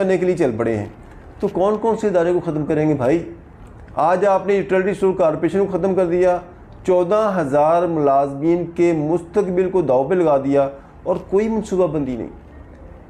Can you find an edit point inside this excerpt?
no; 0 cuts

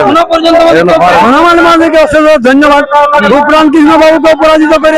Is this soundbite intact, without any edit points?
no; 1 cut; at 1.2 s

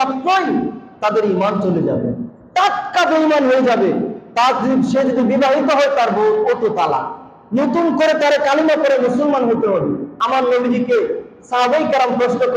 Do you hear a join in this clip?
yes; 1 cut; at 10.1 s

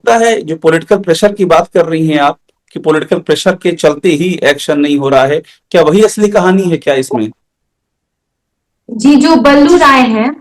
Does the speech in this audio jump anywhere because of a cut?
no; 0 cuts

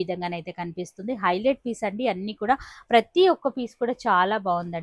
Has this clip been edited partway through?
no; 0 cuts

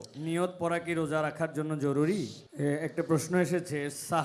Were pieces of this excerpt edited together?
yes; 1 cut; at 2.4 s

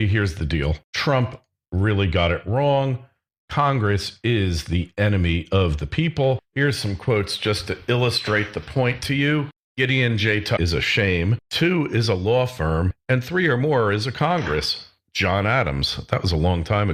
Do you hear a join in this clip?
no; 0 cuts

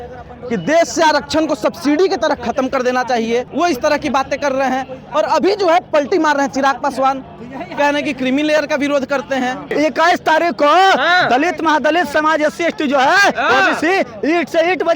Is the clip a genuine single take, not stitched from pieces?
no; 2 cuts; at 3.5 s, 9.7 s

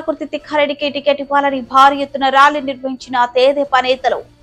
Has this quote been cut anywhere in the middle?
no; 0 cuts

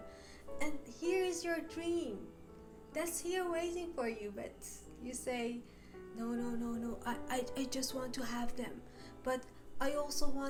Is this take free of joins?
yes; 0 cuts

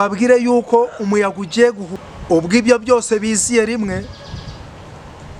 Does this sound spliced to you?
yes; 1 cut; at 1.9 s

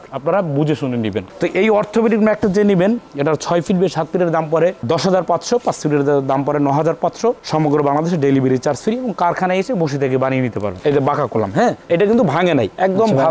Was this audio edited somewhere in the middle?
yes; 1 cut; at 10.7 s

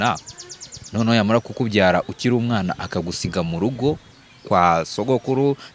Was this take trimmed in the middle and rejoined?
no; 0 cuts

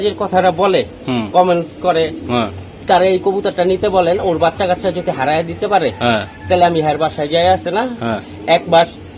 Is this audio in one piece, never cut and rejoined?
yes; 0 cuts

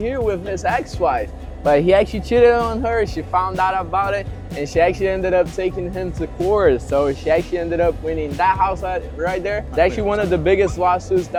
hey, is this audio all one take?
yes; 0 cuts

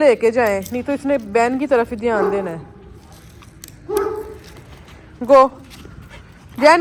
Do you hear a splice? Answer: no; 0 cuts

